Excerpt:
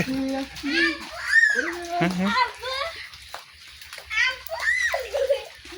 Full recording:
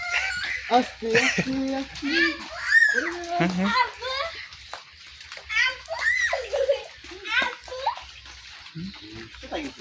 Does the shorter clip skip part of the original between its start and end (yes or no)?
no